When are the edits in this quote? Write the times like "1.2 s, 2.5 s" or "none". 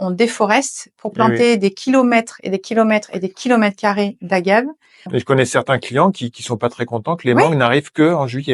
5.1 s